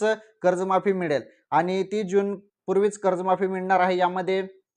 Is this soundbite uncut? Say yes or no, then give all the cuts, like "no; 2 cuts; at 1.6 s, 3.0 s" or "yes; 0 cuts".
yes; 0 cuts